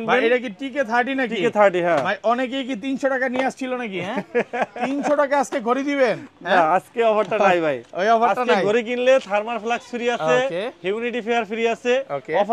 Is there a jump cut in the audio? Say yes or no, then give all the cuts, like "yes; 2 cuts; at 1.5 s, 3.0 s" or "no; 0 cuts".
no; 0 cuts